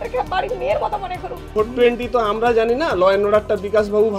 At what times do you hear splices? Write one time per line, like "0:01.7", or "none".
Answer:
0:01.6